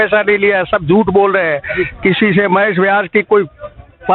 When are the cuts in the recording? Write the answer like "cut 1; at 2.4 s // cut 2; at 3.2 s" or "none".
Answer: none